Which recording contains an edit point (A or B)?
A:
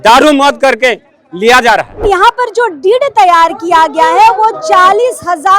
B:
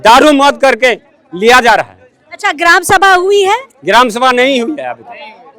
A